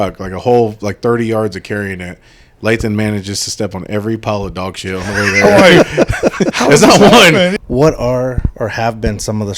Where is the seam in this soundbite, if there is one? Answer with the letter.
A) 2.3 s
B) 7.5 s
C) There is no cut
B